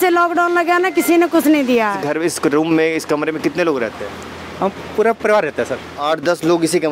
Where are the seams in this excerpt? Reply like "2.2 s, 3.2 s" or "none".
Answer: 2.0 s, 5.9 s